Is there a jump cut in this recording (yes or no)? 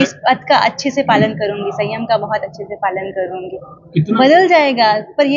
yes